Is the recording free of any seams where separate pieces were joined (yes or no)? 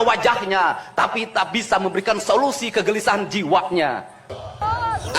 no